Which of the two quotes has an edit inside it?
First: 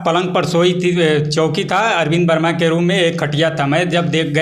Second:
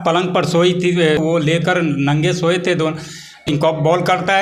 second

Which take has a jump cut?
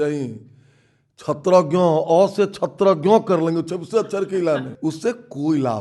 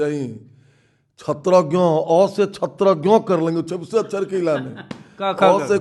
first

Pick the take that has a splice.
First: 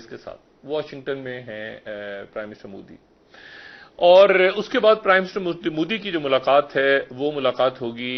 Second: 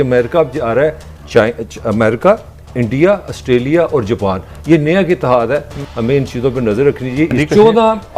second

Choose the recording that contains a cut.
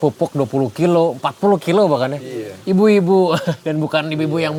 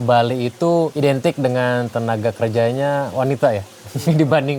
second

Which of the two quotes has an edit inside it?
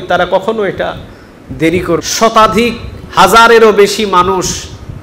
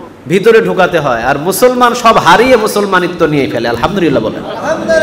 first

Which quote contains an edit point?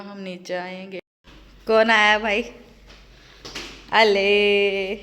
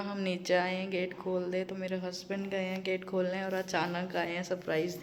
first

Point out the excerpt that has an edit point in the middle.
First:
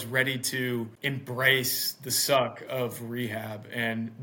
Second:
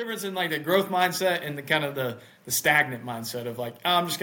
first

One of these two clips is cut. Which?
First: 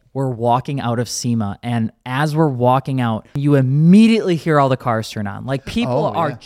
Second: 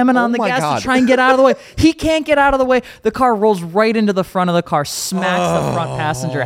first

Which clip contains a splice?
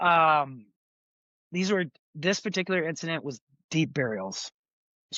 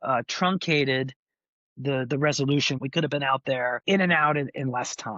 second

